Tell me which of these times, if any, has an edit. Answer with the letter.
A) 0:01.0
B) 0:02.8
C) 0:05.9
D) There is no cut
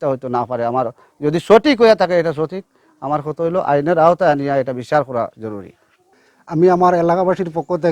C